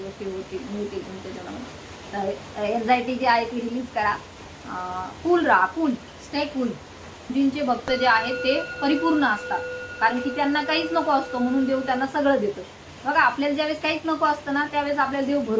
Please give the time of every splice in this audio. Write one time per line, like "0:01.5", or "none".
0:07.3